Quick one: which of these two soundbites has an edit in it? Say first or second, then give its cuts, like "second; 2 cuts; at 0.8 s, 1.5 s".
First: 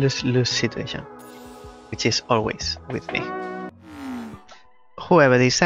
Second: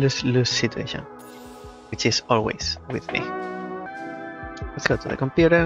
first; 1 cut; at 3.7 s